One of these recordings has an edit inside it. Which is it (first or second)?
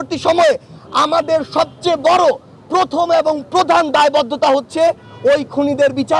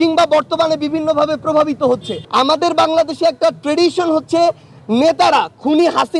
second